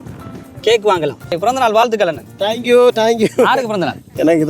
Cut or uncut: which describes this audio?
cut